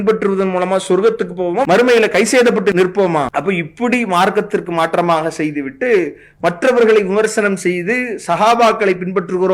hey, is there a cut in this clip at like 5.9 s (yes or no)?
no